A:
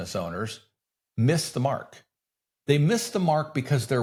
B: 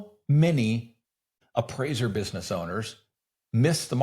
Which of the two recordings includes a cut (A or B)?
B